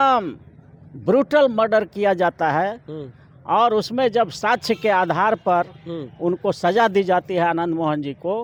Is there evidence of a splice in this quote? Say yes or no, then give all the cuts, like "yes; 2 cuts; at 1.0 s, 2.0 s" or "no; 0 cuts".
no; 0 cuts